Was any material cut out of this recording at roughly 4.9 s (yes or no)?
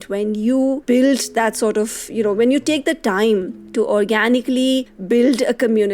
yes